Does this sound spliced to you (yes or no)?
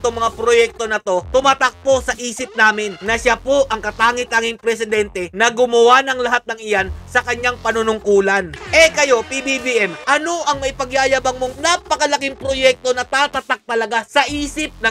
yes